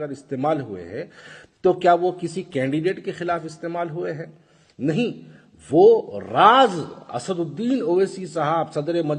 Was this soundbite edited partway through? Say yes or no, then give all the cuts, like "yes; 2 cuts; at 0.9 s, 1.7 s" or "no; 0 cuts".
no; 0 cuts